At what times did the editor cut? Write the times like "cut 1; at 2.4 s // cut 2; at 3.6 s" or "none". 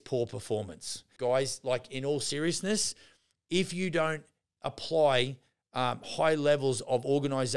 cut 1; at 1.0 s